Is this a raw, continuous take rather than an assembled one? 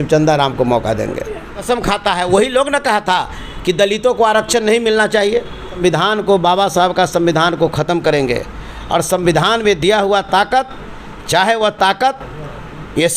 no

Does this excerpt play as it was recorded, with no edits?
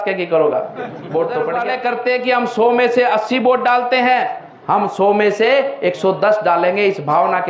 no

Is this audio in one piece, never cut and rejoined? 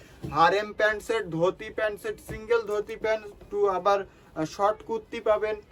yes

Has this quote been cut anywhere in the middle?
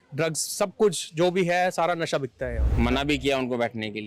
yes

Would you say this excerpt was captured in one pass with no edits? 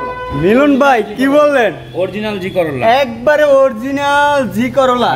yes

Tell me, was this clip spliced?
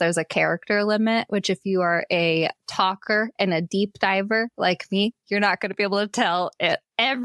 no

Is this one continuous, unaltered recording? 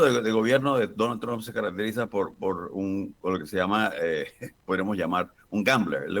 yes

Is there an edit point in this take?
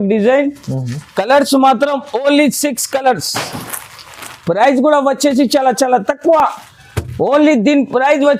no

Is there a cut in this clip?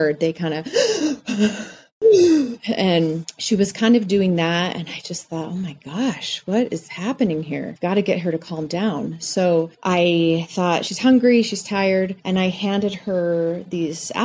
no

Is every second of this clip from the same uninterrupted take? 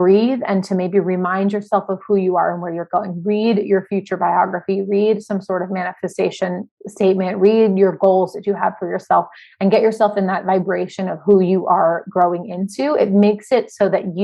yes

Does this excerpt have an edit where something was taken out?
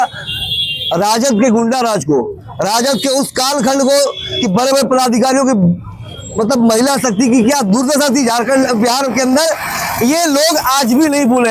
no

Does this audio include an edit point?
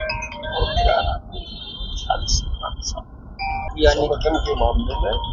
yes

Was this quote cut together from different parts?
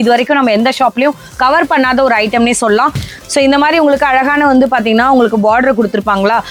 yes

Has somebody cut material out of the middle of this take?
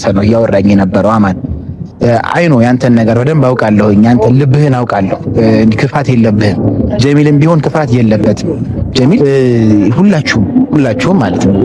yes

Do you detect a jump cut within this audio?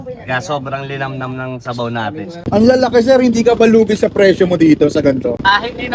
yes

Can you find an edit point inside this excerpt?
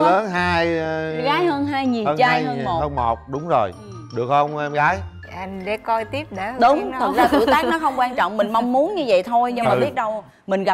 no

